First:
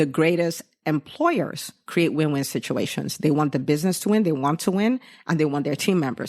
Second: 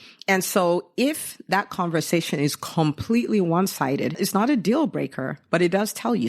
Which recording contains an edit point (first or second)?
second